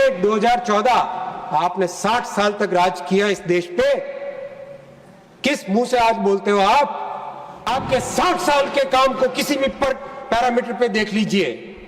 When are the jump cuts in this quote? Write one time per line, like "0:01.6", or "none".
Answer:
0:07.7